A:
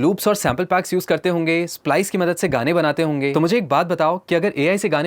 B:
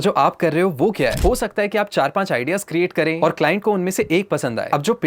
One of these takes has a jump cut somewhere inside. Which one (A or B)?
B